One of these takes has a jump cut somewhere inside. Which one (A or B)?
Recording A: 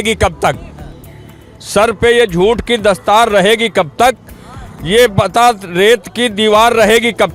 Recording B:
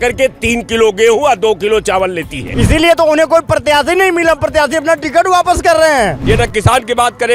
B